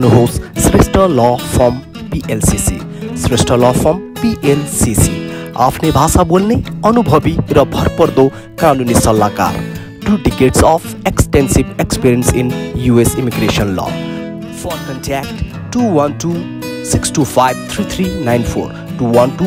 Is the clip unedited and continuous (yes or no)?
yes